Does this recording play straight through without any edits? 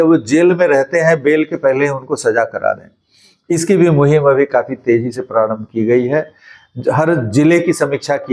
yes; 0 cuts

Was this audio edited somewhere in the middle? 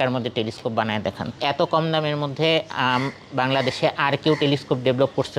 yes; 1 cut; at 1.4 s

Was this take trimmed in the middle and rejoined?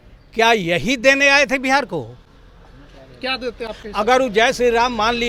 no; 0 cuts

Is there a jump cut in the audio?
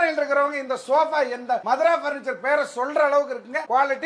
no; 0 cuts

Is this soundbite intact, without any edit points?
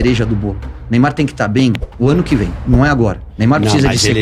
no; 1 cut; at 3.3 s

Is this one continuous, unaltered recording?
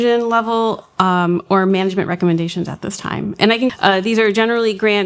no; 1 cut; at 3.4 s

